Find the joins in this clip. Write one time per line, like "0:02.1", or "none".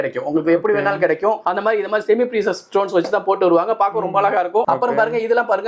0:01.2
0:04.7